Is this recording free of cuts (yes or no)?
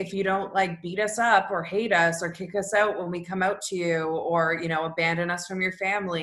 yes